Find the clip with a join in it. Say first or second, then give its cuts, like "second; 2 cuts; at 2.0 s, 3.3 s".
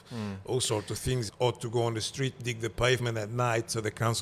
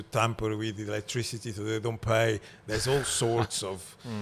first; 1 cut; at 1.3 s